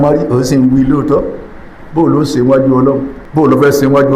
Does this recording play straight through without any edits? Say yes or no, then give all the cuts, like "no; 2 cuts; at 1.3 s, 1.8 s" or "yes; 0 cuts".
no; 1 cut; at 3.2 s